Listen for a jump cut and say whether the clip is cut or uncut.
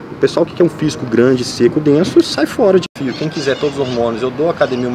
cut